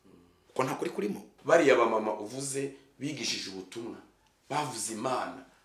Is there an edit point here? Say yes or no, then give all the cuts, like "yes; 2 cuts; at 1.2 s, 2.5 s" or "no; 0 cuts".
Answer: yes; 1 cut; at 1.3 s